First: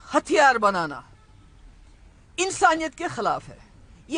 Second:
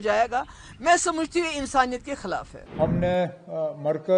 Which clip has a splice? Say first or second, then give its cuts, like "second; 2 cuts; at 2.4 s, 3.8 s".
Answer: second; 1 cut; at 2.6 s